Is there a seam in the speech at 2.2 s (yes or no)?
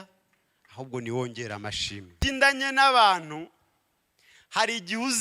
yes